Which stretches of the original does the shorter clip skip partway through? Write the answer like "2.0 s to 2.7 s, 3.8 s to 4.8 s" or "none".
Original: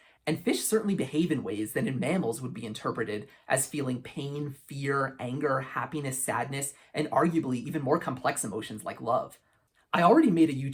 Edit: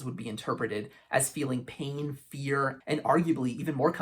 5.1 s to 6.8 s